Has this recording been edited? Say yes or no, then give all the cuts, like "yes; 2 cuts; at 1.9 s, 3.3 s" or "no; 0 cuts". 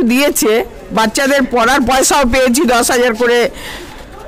no; 0 cuts